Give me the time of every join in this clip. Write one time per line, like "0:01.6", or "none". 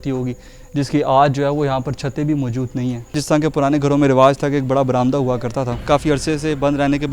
0:03.2
0:05.8